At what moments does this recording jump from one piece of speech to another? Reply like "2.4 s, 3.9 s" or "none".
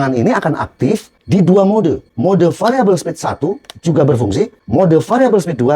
1.1 s, 2.1 s, 4.6 s

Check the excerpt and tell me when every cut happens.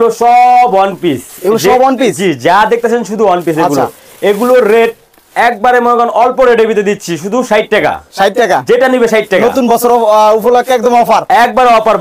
none

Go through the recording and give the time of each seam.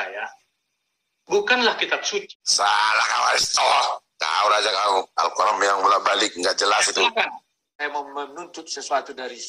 2.4 s, 7.8 s

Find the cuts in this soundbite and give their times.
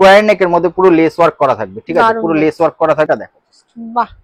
3.1 s

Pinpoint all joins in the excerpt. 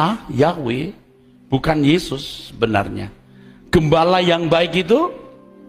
none

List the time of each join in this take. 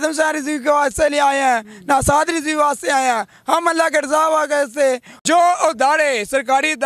5.1 s

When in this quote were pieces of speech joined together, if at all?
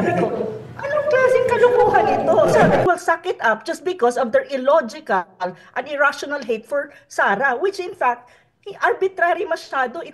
2.8 s

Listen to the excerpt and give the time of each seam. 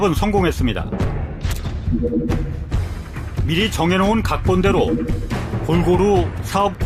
4.1 s

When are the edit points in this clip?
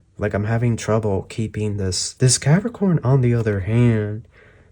2.0 s

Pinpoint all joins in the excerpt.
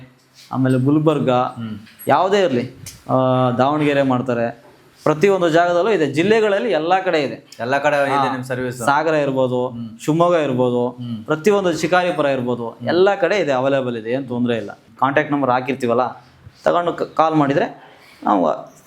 14.8 s

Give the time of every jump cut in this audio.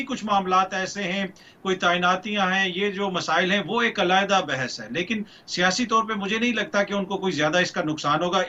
none

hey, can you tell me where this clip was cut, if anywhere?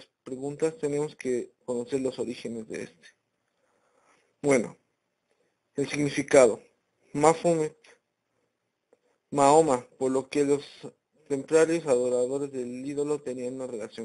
none

